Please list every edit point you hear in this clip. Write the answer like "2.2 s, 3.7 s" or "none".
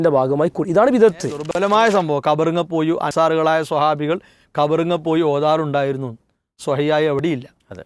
1.4 s